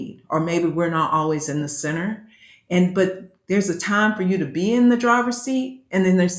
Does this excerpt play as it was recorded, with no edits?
yes; 0 cuts

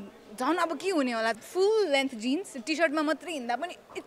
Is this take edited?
yes; 1 cut; at 1.4 s

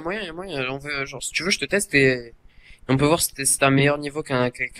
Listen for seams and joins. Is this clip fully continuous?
yes; 0 cuts

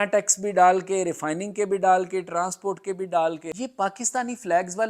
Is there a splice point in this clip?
yes; 1 cut; at 3.5 s

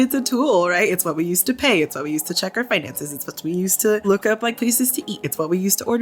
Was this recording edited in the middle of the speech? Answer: yes; 1 cut; at 4.1 s

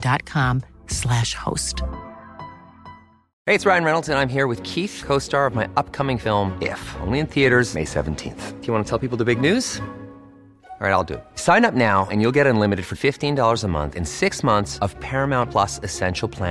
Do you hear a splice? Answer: yes; 1 cut; at 3.2 s

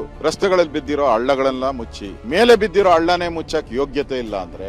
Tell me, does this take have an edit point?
yes; 1 cut; at 2.2 s

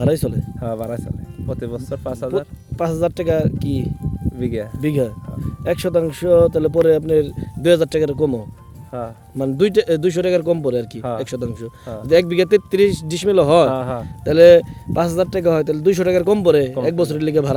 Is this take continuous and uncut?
yes; 0 cuts

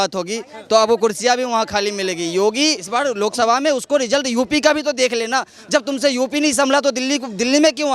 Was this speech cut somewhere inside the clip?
yes; 1 cut; at 2.8 s

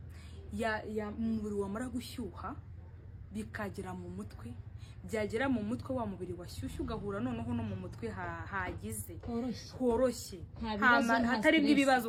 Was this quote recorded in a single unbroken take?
yes; 0 cuts

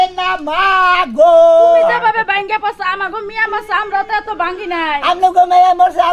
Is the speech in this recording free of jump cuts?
yes; 0 cuts

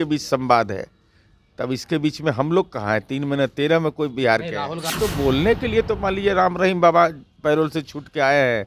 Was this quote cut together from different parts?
yes; 1 cut; at 4.8 s

